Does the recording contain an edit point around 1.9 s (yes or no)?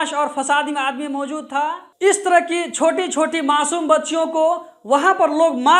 yes